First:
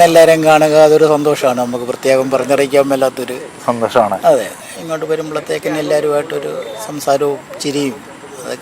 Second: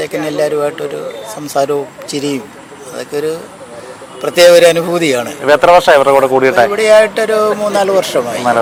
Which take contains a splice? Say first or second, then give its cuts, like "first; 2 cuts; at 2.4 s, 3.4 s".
first; 1 cut; at 4.6 s